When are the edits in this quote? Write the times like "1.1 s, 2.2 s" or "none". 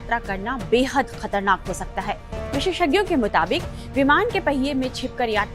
2.4 s